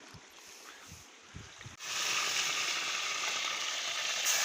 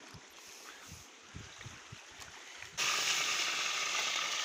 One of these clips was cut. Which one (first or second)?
first